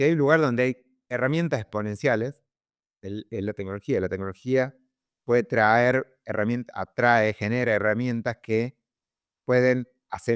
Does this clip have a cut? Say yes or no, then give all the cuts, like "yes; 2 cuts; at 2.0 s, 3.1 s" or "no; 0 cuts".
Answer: no; 0 cuts